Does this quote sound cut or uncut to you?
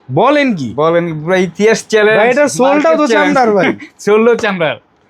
uncut